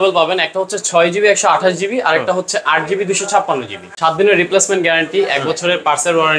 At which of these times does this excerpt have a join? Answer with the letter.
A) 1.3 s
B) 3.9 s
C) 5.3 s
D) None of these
B